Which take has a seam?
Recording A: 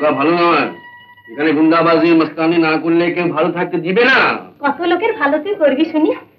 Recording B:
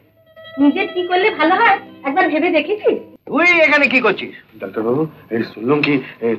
B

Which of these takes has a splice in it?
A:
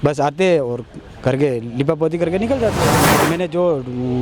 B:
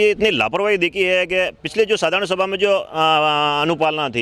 A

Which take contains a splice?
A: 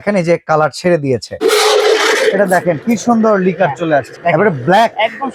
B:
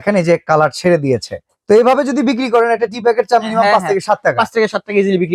A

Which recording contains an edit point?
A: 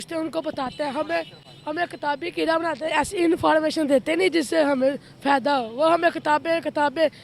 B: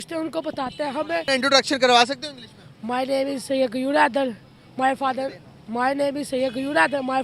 B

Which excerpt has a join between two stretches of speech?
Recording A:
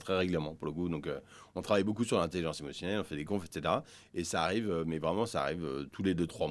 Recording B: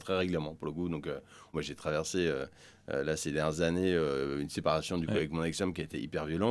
B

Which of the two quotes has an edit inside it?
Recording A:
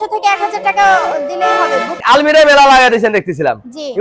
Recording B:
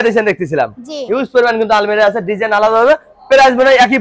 A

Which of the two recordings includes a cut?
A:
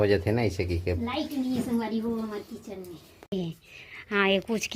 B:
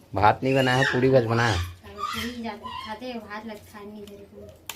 A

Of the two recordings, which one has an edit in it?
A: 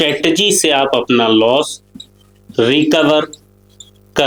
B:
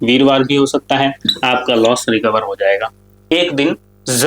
B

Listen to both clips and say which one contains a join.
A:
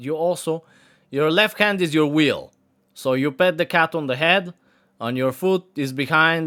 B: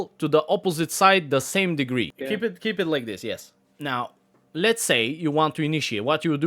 B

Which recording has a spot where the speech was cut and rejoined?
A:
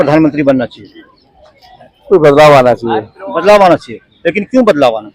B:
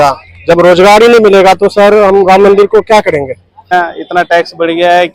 B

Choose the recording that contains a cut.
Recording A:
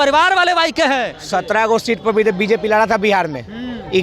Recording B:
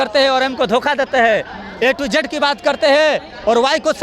A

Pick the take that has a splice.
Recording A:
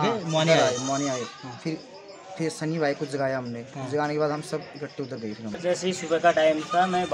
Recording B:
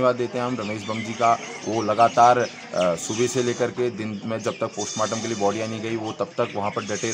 A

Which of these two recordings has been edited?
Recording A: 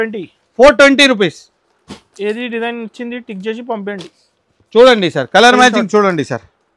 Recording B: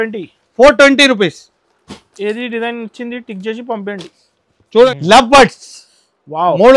B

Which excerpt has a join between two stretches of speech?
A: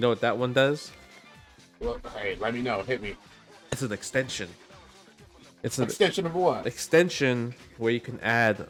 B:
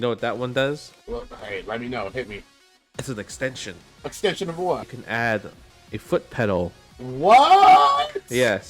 B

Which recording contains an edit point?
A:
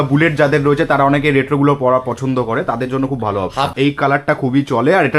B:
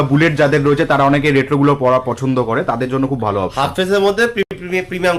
A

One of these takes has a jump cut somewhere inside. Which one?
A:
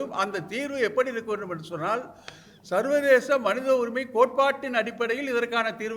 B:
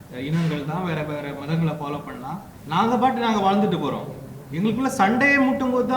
B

